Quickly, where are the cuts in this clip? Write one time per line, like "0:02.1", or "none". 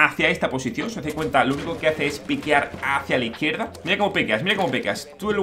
0:03.8